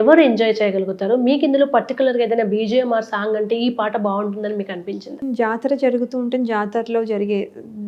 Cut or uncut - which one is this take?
cut